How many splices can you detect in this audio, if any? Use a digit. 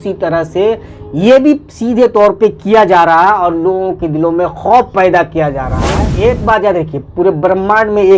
1